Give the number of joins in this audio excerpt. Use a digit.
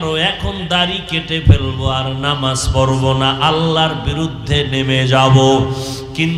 0